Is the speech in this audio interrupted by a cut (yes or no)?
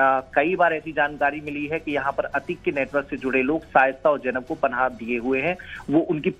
yes